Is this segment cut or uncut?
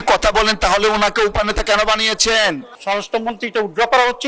cut